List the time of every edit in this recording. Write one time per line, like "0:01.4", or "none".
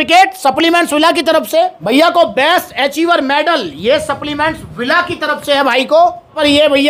none